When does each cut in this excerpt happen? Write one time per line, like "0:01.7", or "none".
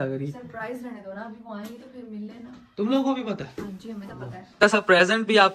0:04.5